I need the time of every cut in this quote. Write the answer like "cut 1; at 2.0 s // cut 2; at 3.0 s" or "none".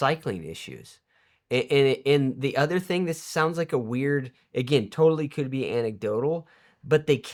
none

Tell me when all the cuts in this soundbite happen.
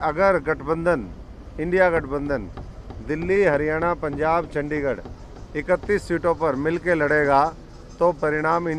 none

